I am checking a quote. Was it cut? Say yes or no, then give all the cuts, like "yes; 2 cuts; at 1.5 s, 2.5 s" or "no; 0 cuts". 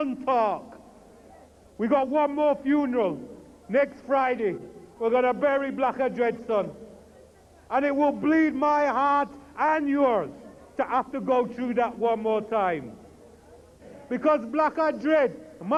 no; 0 cuts